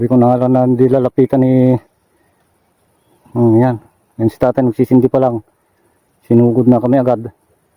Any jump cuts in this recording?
no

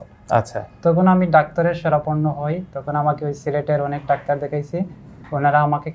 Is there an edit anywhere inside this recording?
no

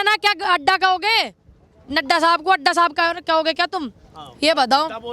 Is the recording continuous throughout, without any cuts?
yes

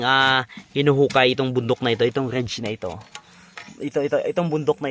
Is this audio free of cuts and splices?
yes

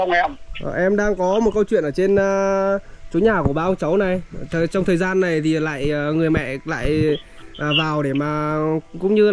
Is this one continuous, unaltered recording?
yes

